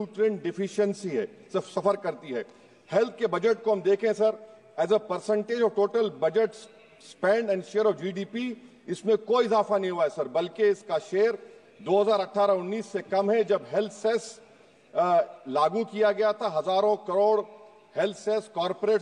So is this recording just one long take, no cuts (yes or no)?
yes